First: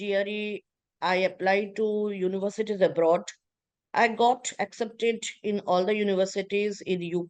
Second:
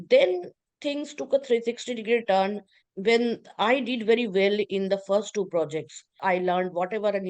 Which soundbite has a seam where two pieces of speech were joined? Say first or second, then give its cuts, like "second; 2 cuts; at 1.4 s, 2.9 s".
second; 1 cut; at 6.2 s